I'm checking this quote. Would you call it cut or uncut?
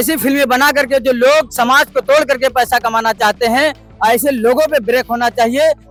uncut